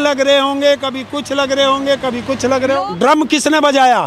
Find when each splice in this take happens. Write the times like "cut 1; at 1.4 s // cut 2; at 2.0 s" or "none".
cut 1; at 2.9 s